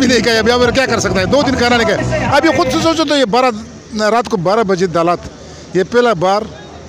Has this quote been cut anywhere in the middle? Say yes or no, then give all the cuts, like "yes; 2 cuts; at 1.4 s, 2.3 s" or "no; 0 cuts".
no; 0 cuts